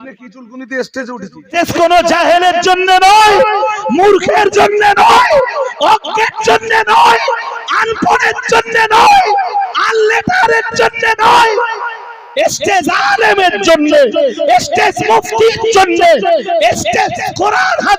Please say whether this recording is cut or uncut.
cut